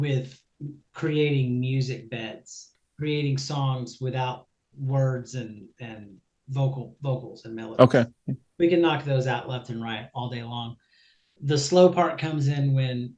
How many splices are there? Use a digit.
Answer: 1